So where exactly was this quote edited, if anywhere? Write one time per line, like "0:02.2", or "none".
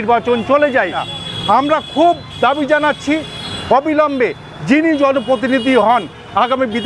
0:01.0

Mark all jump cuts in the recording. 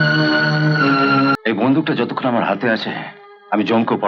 0:01.4

